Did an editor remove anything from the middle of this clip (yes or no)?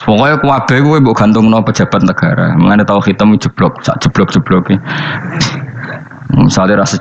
yes